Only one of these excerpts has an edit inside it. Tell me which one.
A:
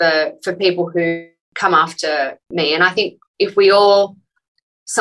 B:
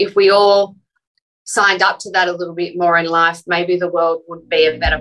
A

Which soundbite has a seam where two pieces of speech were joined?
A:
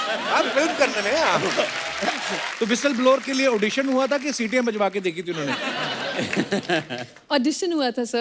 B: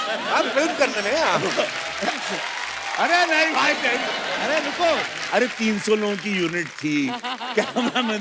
A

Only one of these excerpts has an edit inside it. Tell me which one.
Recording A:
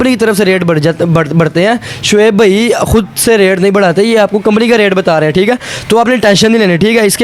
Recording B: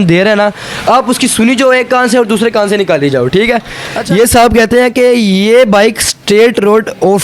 B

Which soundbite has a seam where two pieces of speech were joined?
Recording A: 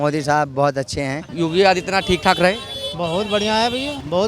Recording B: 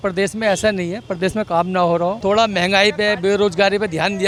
A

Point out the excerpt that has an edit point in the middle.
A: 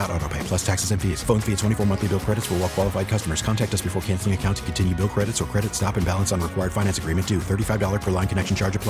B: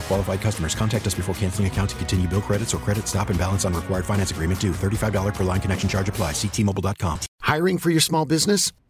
B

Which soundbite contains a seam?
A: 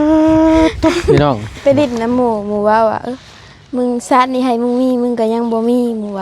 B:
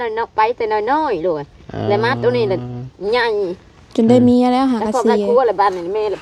A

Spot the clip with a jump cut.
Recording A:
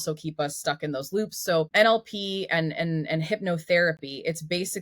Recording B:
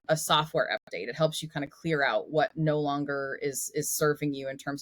A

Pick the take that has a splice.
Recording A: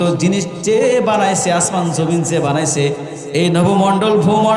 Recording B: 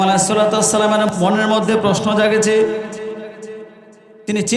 B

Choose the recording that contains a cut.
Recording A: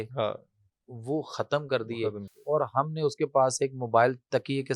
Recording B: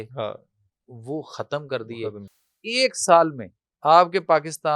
B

